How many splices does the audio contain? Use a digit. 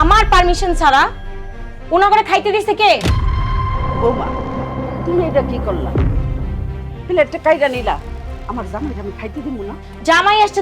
0